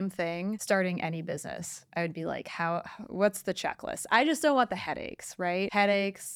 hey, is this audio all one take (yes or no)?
yes